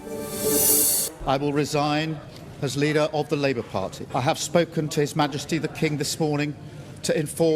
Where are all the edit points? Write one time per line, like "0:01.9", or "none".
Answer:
0:00.9
0:04.0